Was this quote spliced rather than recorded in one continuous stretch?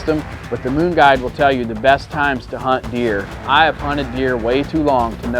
yes; 1 cut; at 3.4 s

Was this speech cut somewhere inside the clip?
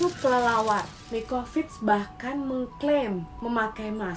yes; 1 cut; at 1.0 s

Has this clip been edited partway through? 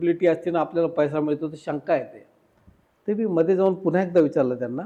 no; 0 cuts

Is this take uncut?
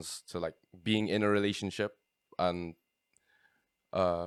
yes; 0 cuts

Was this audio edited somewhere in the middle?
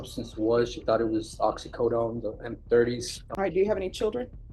yes; 1 cut; at 3.2 s

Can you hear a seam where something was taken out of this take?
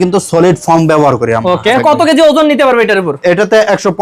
yes; 1 cut; at 1.8 s

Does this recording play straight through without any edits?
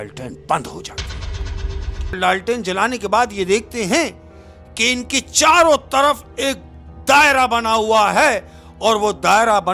no; 1 cut; at 2.1 s

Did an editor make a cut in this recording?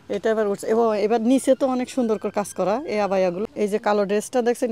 yes; 1 cut; at 3.4 s

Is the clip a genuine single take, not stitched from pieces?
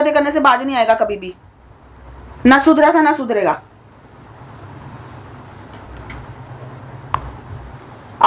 yes; 0 cuts

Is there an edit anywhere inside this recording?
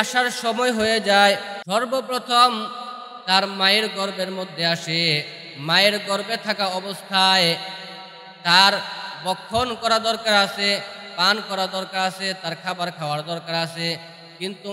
yes; 1 cut; at 1.5 s

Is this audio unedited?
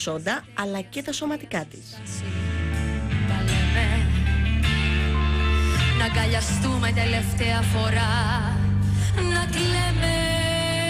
no; 1 cut; at 9.1 s

